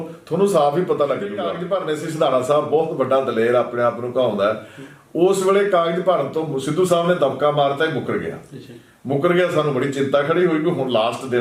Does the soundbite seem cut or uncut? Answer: cut